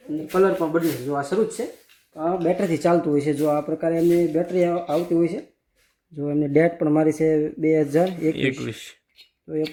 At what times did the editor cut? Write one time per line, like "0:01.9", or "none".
none